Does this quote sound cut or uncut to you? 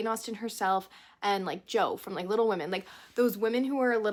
uncut